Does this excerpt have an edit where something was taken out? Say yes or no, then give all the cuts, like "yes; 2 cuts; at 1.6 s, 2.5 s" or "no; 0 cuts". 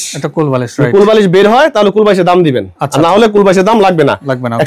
no; 0 cuts